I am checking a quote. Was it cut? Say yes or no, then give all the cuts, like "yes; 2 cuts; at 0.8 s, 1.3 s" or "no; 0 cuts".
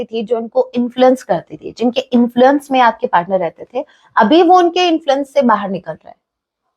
no; 0 cuts